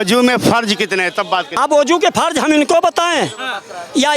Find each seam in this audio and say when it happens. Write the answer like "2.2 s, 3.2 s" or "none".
1.5 s